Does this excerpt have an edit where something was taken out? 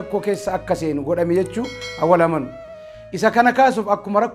no; 0 cuts

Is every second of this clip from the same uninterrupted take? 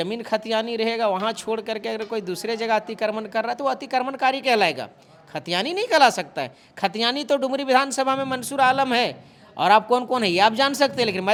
yes; 0 cuts

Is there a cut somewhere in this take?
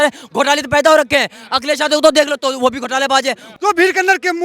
yes; 1 cut; at 3.5 s

